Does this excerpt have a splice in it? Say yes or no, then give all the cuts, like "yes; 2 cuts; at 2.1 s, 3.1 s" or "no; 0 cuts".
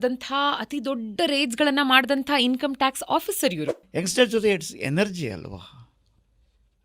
yes; 1 cut; at 3.8 s